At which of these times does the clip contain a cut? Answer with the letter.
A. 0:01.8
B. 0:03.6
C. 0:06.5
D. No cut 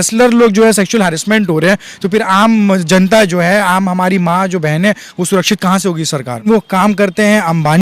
C